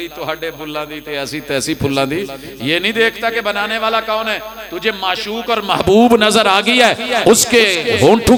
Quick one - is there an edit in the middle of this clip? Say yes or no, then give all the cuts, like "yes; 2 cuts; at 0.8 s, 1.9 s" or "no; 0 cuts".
no; 0 cuts